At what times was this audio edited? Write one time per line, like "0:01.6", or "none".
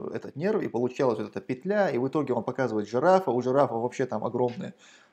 none